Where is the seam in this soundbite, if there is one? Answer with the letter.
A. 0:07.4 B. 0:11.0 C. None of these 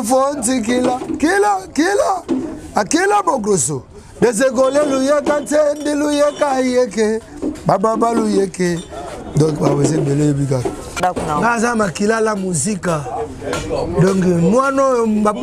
B